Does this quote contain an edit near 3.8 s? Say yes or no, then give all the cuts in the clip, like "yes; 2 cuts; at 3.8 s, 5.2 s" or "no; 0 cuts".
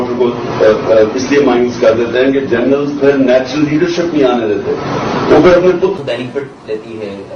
no; 1 cut; at 5.9 s